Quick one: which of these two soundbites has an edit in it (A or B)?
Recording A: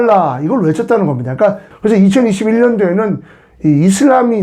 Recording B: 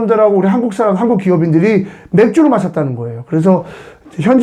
A